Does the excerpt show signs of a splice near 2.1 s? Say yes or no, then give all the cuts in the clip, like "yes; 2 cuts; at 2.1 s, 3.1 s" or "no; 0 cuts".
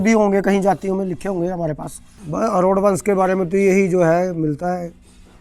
yes; 1 cut; at 2.1 s